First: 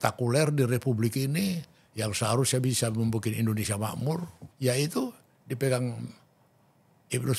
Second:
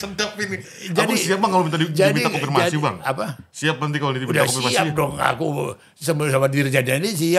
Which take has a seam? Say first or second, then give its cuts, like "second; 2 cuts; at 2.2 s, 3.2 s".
first; 1 cut; at 4.4 s